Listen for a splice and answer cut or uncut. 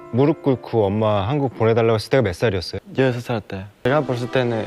cut